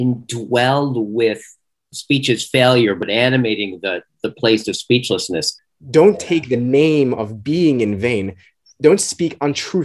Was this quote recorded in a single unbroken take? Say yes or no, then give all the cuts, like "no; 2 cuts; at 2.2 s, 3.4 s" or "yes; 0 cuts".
no; 4 cuts; at 1.9 s, 3.0 s, 5.5 s, 8.6 s